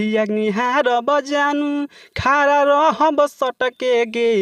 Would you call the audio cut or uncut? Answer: uncut